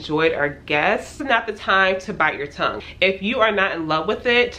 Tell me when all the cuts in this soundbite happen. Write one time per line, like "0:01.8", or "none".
0:01.1
0:02.8